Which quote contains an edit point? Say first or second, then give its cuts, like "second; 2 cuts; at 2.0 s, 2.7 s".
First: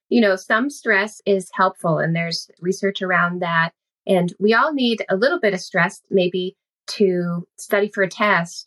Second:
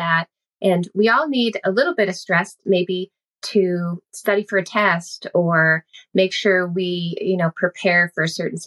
first; 2 cuts; at 1.1 s, 2.5 s